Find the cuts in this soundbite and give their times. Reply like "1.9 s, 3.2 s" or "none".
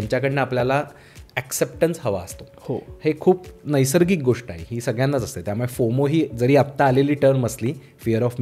none